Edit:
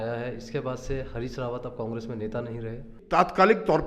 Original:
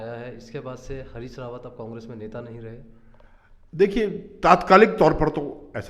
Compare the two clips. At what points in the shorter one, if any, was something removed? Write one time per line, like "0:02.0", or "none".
0:02.9

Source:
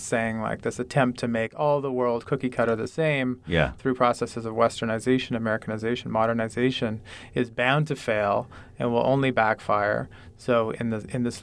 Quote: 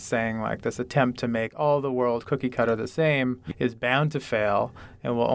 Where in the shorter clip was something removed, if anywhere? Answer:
0:03.4

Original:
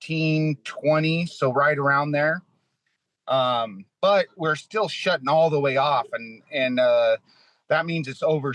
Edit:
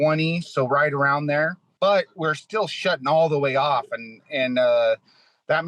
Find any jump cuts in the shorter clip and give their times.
0:01.6

